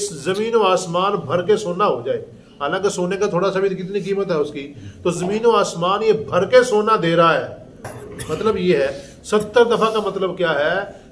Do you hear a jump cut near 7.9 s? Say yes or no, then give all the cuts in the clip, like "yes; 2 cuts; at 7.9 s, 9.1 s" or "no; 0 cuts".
yes; 1 cut; at 7.9 s